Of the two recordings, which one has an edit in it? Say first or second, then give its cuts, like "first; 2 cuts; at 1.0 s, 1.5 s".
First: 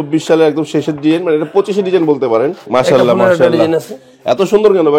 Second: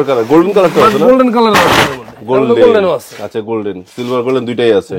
first; 1 cut; at 2.6 s